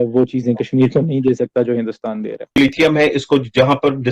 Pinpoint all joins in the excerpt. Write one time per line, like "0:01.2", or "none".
0:02.6